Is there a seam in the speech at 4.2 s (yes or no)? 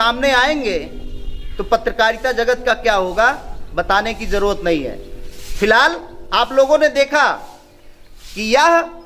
no